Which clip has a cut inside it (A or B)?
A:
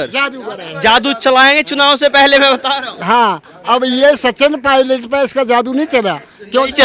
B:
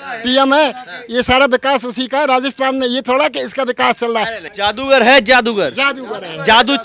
B